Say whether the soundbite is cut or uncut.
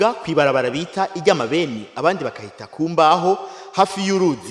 uncut